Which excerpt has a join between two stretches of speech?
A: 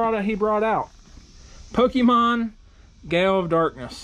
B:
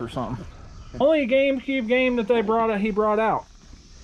B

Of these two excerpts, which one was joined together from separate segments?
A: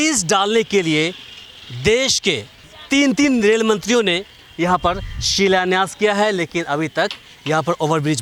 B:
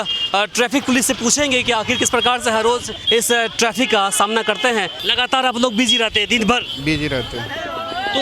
B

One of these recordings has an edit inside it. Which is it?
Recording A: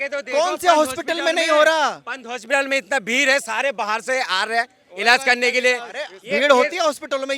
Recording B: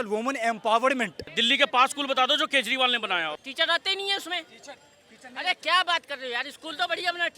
B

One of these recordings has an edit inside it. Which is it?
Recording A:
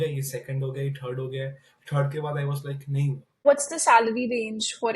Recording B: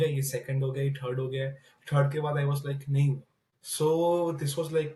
A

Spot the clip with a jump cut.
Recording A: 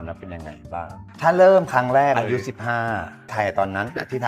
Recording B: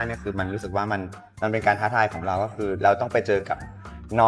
A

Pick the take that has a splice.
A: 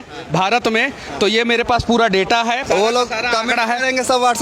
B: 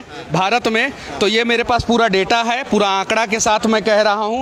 A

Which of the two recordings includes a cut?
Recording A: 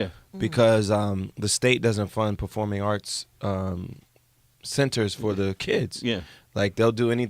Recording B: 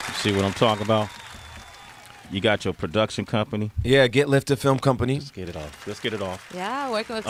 A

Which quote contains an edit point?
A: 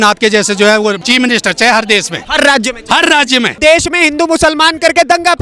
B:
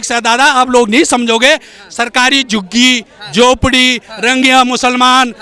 A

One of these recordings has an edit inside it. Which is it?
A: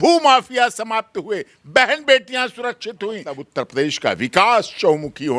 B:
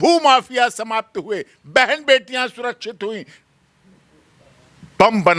A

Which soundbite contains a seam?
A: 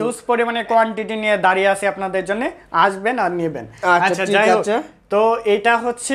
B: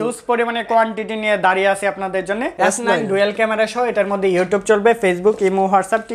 B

